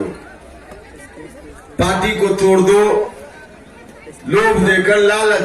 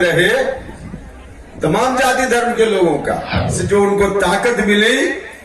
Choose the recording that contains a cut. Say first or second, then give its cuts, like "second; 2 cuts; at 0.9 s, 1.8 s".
second; 1 cut; at 3.3 s